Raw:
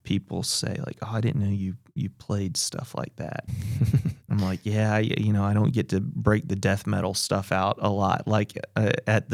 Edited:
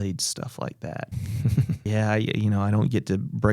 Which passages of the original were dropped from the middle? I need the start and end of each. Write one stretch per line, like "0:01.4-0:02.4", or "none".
0:04.2-0:04.6